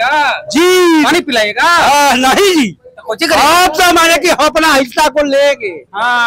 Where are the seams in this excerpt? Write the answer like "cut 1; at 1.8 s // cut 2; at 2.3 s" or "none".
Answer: none